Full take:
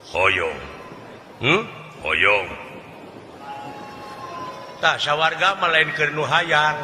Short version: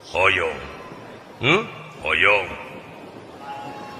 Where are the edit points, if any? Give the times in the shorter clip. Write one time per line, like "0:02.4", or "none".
none